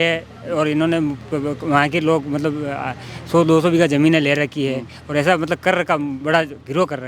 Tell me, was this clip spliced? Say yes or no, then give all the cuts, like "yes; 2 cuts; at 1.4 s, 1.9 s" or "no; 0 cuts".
no; 0 cuts